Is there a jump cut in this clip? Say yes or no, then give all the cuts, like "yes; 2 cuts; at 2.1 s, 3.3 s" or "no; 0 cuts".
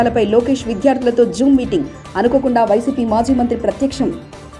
no; 0 cuts